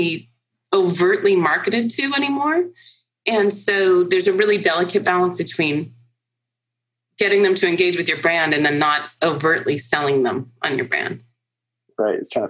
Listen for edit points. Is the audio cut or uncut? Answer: uncut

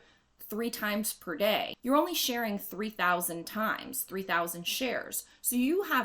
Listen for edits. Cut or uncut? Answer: cut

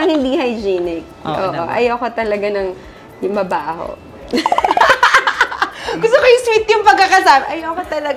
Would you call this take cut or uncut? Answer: uncut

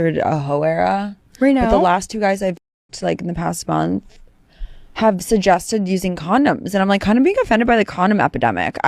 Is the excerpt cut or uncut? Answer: uncut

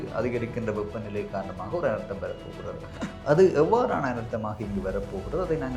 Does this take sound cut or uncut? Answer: uncut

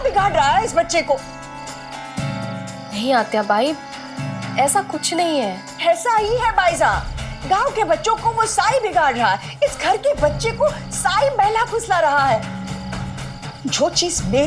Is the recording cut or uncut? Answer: uncut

